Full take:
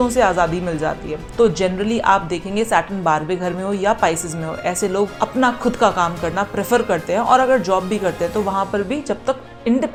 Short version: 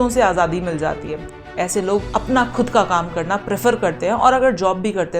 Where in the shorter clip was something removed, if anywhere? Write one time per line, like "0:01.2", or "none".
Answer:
0:01.2